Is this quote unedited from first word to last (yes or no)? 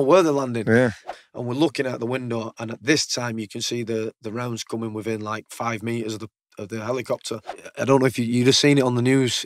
no